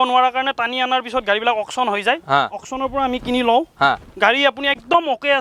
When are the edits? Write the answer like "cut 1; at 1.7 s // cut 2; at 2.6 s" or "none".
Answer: none

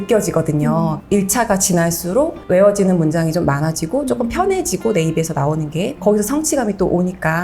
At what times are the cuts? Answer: cut 1; at 1.0 s // cut 2; at 2.4 s // cut 3; at 6.0 s

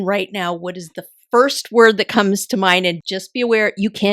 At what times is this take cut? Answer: cut 1; at 3.0 s

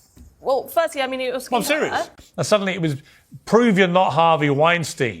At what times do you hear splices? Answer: cut 1; at 2.2 s

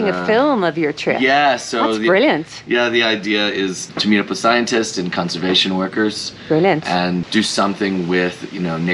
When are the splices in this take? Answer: cut 1; at 3.8 s // cut 2; at 7.2 s

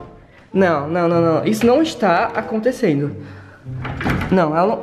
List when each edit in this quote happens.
none

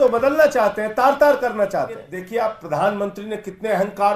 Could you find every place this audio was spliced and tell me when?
cut 1; at 2.2 s

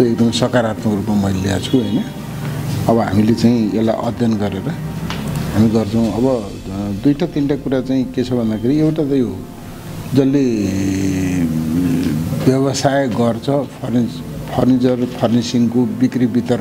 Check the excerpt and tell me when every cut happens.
none

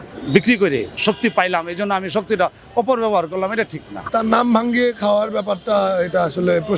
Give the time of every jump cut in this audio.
cut 1; at 0.9 s // cut 2; at 4.1 s

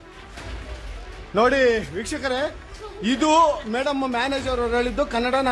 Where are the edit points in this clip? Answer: cut 1; at 1.3 s

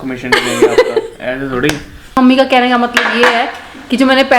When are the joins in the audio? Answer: cut 1; at 2.2 s

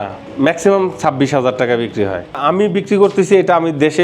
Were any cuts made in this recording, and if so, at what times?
none

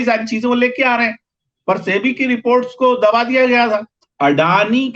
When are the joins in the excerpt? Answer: cut 1; at 4.0 s

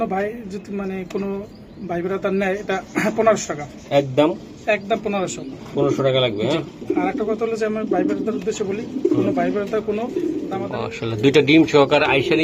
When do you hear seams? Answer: cut 1; at 10.5 s

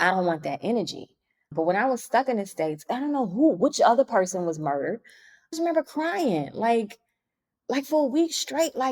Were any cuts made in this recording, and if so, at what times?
cut 1; at 2.8 s // cut 2; at 5.5 s

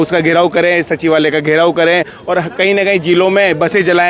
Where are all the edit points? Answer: none

